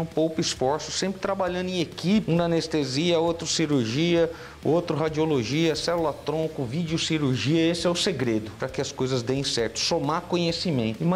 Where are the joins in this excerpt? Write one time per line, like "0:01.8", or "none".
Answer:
0:02.2